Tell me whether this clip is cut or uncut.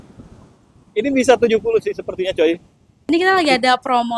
cut